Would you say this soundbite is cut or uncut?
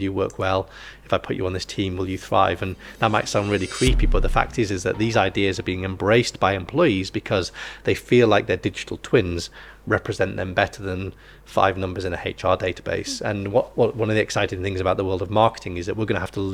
uncut